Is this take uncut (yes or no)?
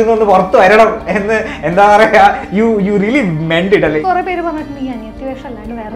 no